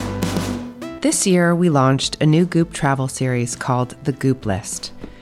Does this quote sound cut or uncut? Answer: cut